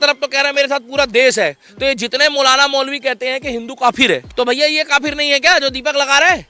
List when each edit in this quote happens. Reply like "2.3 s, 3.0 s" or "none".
4.2 s

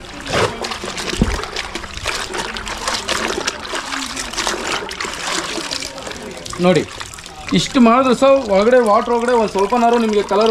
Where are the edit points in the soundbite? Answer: none

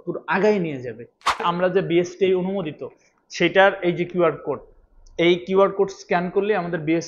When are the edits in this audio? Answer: 1.4 s

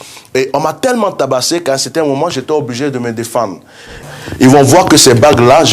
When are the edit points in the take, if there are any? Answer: 4.0 s

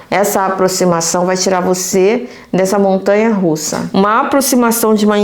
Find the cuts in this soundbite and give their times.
3.8 s

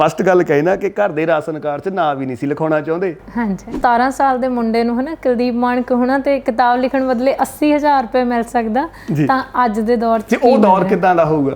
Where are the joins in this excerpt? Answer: 3.8 s

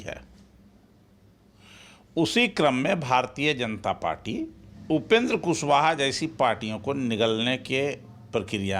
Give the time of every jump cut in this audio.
4.7 s

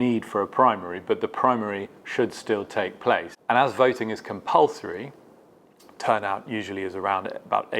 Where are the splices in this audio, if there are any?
3.3 s

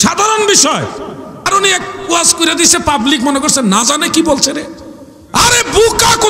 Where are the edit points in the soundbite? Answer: 1.5 s

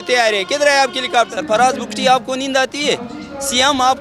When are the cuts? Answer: 1.4 s

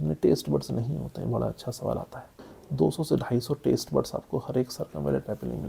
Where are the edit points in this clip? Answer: 2.6 s

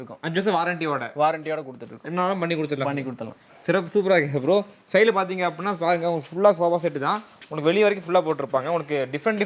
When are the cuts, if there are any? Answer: none

